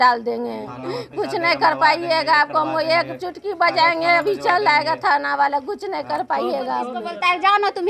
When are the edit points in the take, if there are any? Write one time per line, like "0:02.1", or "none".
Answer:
0:07.0